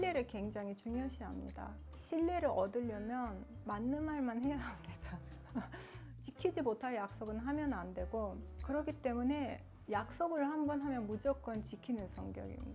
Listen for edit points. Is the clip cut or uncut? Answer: cut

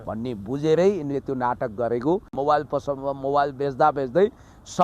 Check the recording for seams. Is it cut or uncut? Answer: cut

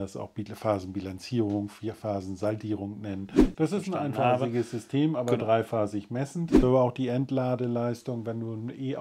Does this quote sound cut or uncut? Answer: cut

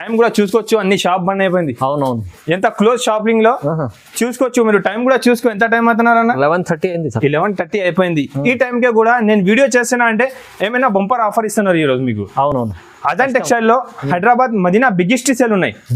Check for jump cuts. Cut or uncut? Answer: uncut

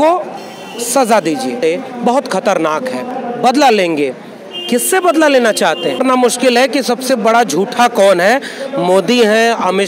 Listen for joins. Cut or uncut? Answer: cut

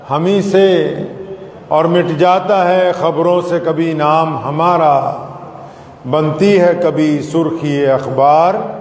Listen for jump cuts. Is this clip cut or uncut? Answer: uncut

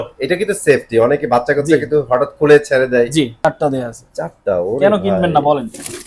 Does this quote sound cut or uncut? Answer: cut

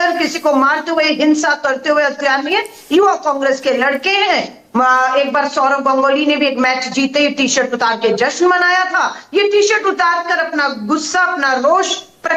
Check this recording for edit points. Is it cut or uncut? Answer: uncut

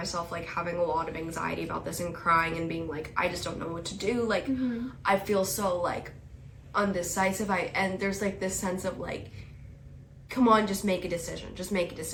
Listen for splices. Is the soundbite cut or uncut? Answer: uncut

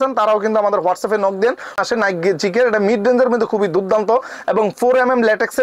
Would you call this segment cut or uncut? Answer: cut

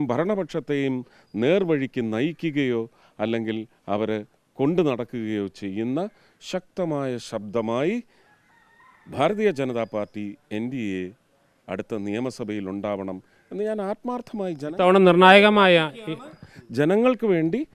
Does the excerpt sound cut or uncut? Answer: uncut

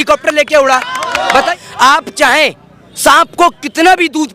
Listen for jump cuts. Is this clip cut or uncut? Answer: cut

